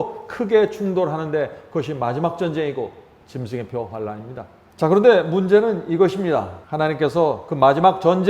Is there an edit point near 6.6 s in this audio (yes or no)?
yes